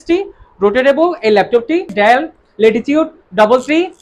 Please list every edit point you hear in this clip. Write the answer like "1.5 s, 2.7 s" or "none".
1.9 s